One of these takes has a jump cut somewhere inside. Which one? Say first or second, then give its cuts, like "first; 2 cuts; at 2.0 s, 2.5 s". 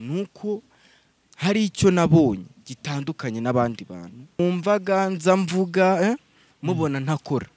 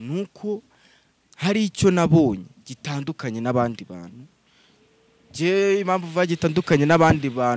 first; 1 cut; at 4.4 s